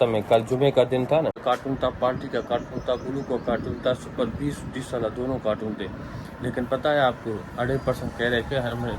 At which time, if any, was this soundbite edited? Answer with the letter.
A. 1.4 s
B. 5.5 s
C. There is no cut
A